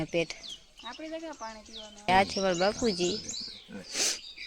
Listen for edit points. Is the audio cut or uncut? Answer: cut